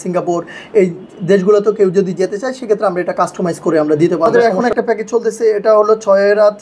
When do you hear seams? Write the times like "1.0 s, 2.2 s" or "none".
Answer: 4.6 s